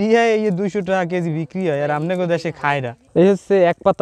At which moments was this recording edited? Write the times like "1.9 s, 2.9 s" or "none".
3.0 s